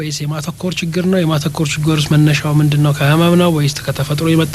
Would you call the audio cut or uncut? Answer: uncut